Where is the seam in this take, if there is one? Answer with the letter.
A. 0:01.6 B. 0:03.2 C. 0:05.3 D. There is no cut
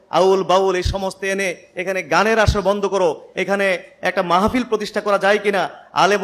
D